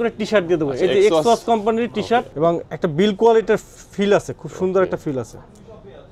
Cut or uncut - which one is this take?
cut